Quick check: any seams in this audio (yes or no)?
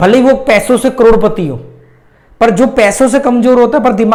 no